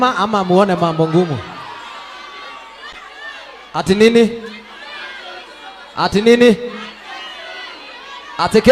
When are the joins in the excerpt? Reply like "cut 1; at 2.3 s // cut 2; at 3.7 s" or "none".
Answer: none